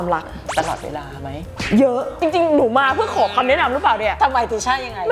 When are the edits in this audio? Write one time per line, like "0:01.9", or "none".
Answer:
none